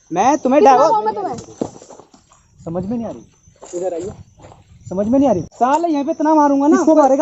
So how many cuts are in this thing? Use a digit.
1